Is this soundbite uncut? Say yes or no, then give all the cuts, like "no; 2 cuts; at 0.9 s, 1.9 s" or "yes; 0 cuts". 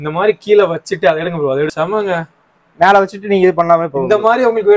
no; 1 cut; at 1.7 s